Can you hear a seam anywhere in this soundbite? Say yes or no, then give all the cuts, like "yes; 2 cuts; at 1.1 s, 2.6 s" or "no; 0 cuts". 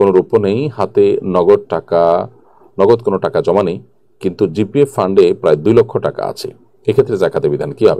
no; 0 cuts